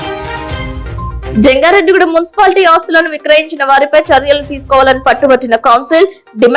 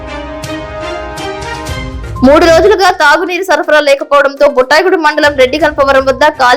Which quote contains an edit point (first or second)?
second